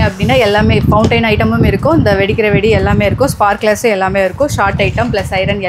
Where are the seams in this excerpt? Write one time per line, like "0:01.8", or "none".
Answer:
none